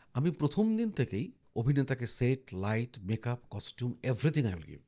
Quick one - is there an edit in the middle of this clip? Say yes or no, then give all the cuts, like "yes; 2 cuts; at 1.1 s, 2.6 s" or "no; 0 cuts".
yes; 1 cut; at 1.4 s